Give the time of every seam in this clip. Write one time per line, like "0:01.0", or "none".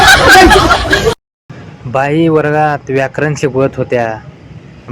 0:01.3